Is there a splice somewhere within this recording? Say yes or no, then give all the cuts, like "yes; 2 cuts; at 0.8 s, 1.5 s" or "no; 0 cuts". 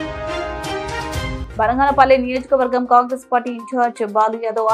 no; 0 cuts